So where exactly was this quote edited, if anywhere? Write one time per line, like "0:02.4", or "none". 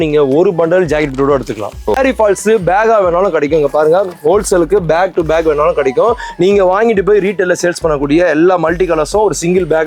0:02.0